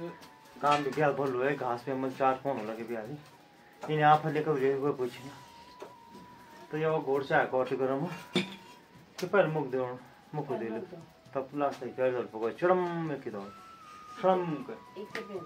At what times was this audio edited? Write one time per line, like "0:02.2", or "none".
none